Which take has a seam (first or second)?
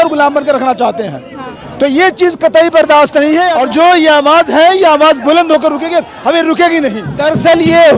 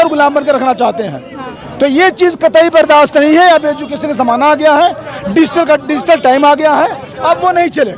first